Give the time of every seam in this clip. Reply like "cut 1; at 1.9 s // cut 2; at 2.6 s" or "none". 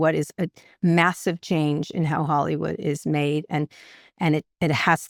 none